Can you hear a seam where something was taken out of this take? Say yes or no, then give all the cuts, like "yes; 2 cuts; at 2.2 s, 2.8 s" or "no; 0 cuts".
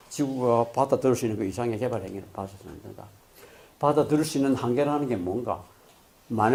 no; 0 cuts